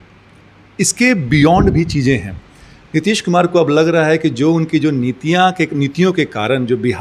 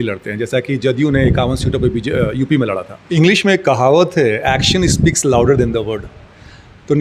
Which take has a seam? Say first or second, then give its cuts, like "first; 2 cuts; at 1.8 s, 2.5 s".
second; 1 cut; at 3.0 s